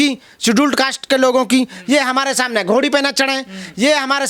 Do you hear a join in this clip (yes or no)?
no